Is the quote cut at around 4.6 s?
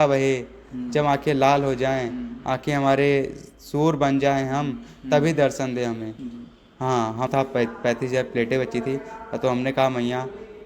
no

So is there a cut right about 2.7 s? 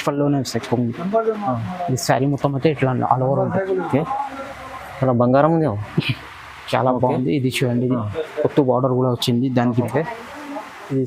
no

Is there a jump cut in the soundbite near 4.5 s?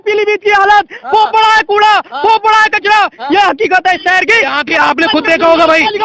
no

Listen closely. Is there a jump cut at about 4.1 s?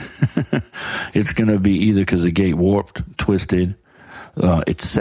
no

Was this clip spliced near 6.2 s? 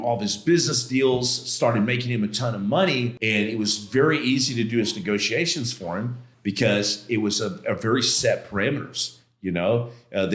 yes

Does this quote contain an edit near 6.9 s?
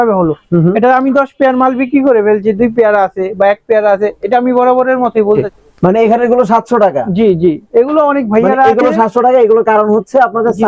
no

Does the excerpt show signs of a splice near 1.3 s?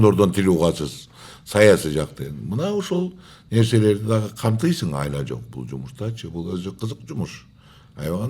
no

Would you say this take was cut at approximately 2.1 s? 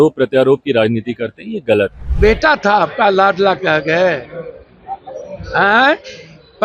yes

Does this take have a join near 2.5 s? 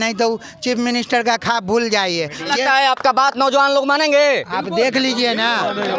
yes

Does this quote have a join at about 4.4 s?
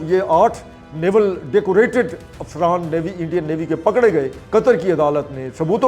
yes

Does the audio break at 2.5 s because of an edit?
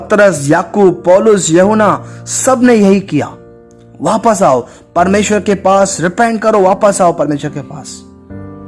no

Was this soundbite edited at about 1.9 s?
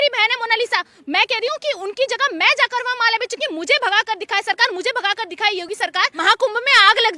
no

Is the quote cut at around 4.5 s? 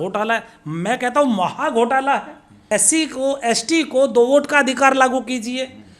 no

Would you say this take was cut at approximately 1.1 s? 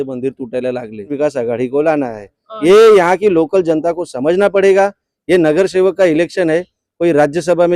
yes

